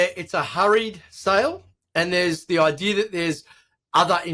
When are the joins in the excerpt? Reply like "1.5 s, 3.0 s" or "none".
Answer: 2.4 s